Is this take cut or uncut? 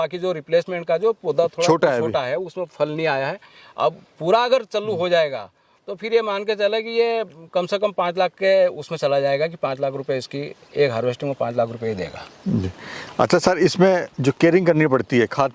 uncut